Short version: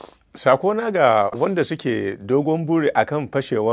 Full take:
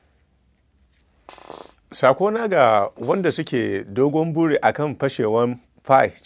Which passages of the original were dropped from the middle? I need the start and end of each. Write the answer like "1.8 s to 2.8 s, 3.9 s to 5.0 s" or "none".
2.9 s to 3.0 s